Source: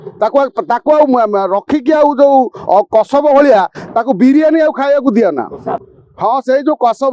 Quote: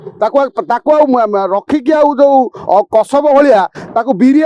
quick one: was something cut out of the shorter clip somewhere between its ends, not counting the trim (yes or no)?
no